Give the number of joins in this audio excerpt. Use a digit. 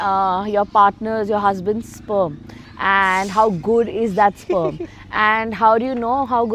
0